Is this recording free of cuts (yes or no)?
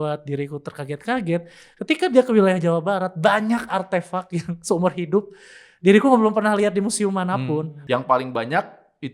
no